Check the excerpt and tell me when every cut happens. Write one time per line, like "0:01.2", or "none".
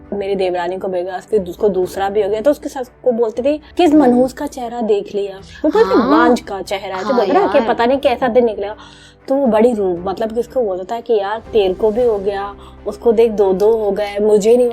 0:01.2
0:03.7